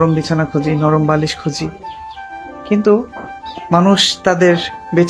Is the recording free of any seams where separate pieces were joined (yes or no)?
yes